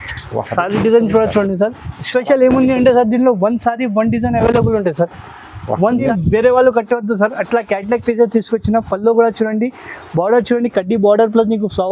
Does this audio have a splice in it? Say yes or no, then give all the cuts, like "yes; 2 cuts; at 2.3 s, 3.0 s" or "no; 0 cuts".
yes; 1 cut; at 6.1 s